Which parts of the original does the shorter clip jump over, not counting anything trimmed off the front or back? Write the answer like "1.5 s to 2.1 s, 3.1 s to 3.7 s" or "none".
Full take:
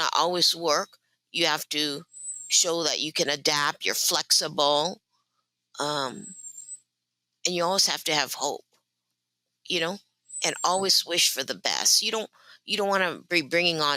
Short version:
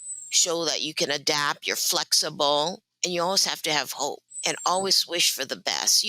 5.1 s to 7.3 s, 8.7 s to 10.3 s